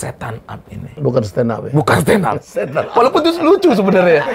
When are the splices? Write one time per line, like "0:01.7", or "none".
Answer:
0:01.0